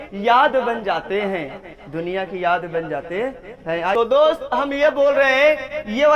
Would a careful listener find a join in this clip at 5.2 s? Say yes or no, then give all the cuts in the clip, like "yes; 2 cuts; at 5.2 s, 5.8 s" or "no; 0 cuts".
no; 1 cut; at 3.9 s